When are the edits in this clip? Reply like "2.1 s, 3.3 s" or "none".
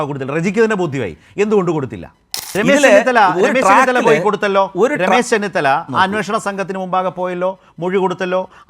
2.4 s